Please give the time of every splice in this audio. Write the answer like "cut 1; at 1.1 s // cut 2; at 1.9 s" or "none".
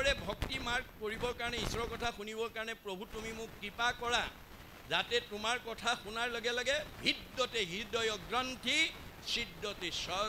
none